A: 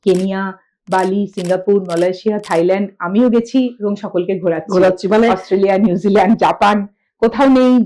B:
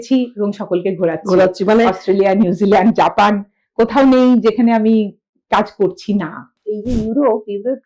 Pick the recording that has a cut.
B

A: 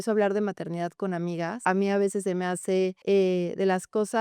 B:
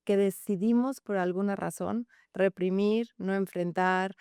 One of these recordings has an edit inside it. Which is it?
A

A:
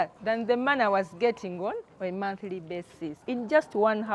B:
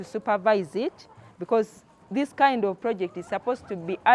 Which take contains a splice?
A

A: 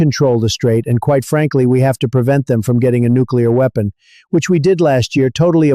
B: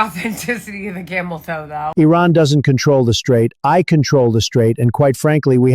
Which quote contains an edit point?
B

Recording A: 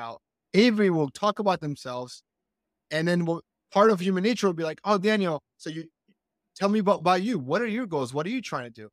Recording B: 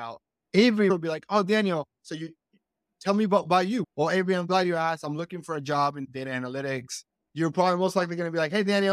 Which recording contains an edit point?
B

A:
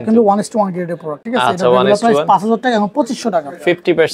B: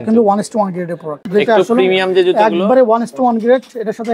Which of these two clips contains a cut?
B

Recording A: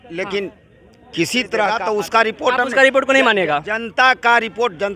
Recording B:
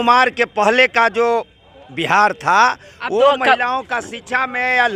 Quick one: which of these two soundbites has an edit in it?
A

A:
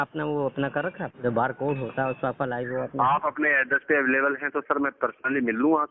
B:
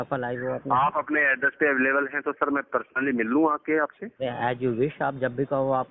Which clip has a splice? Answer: A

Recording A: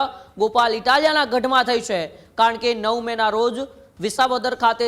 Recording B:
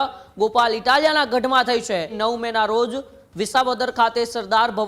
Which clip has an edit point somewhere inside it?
B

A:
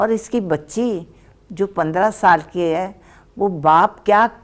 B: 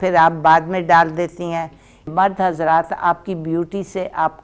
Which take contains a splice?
B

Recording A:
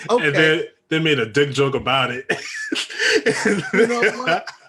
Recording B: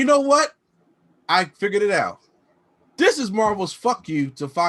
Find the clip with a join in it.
A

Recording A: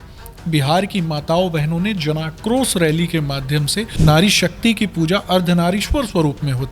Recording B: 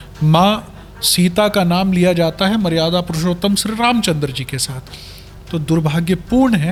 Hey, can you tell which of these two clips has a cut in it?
A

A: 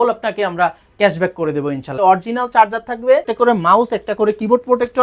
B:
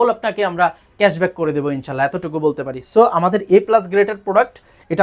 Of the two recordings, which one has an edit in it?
A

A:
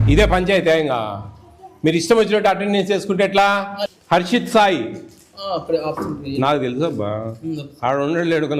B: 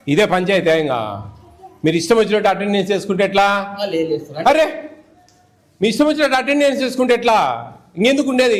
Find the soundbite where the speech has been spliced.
A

